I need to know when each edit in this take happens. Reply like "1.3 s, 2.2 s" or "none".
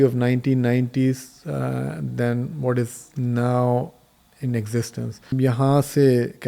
5.3 s